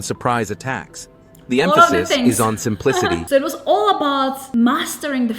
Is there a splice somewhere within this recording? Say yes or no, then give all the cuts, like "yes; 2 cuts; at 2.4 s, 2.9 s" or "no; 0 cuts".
yes; 1 cut; at 3.2 s